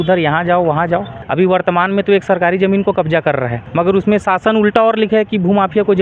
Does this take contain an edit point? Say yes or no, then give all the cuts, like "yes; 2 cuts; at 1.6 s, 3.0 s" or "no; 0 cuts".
yes; 2 cuts; at 1.2 s, 3.6 s